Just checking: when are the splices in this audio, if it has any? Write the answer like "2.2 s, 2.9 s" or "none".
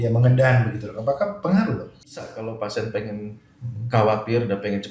2.2 s